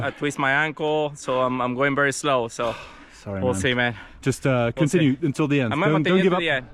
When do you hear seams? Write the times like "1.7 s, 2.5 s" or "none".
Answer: none